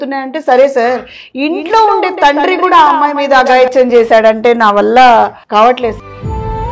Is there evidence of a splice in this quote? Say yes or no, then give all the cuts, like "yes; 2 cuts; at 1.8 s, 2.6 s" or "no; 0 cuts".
yes; 1 cut; at 5.4 s